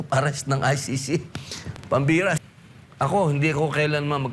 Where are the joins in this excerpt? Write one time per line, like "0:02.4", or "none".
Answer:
0:02.4